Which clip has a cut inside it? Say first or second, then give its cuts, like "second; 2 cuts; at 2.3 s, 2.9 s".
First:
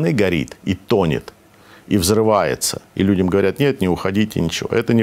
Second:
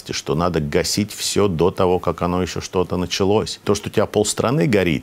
second; 1 cut; at 3.6 s